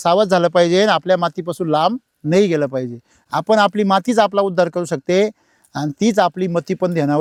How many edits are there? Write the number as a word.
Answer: zero